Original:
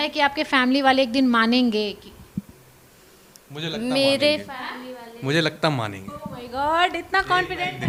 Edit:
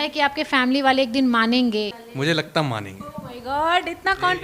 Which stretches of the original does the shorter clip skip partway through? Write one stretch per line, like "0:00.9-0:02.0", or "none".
0:02.0-0:05.1